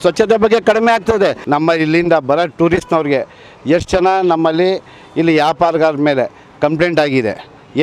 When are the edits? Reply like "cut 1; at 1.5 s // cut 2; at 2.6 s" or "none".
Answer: cut 1; at 1.4 s